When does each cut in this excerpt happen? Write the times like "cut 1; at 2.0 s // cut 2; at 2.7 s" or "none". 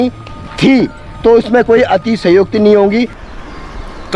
cut 1; at 3.2 s